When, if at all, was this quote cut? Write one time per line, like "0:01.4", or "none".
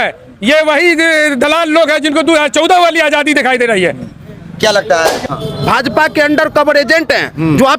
0:05.2

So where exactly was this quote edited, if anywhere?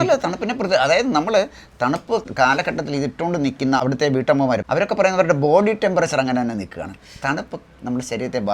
0:02.3
0:03.8

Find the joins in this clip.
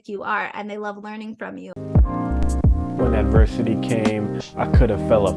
0:01.8

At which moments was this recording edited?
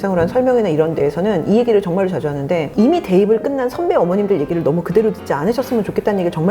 0:02.7

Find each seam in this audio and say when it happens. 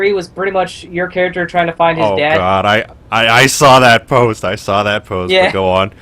0:03.0

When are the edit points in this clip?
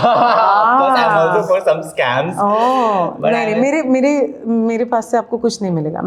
none

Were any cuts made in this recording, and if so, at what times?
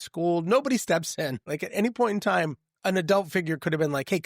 0:01.4

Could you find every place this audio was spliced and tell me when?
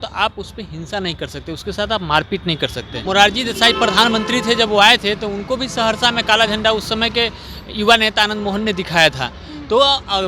0:03.0

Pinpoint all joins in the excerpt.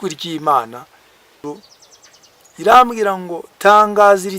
0:01.4

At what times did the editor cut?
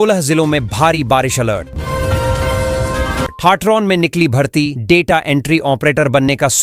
none

